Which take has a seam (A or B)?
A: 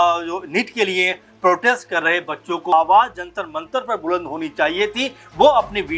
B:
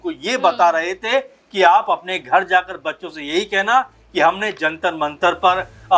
A